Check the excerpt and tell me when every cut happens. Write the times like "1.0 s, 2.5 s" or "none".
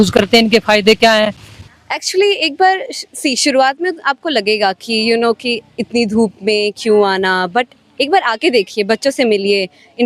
1.5 s